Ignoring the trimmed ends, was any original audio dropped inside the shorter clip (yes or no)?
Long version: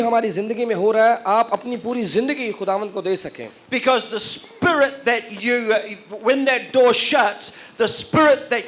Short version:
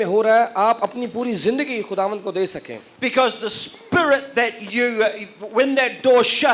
no